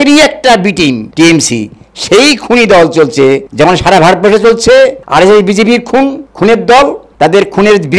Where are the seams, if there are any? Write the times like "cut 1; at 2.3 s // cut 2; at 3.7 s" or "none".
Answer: cut 1; at 1.1 s // cut 2; at 3.5 s // cut 3; at 5.0 s // cut 4; at 6.2 s